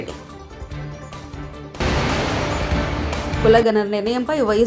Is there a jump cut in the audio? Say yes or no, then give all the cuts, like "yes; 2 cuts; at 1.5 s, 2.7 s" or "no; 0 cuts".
yes; 2 cuts; at 1.7 s, 3.4 s